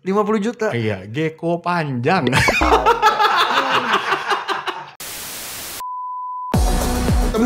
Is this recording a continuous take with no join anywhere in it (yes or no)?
no